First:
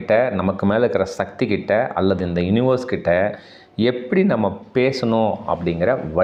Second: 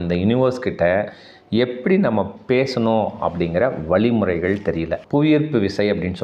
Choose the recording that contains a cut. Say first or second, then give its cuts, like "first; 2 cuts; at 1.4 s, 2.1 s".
second; 1 cut; at 5.0 s